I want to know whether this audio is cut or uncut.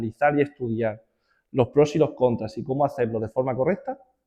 uncut